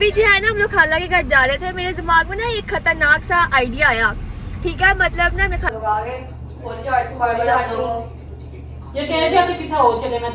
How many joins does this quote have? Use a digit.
1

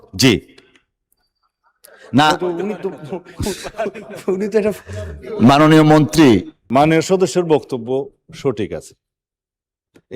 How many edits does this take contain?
1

